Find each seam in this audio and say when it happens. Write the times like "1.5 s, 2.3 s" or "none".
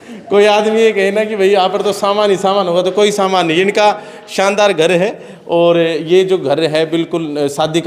none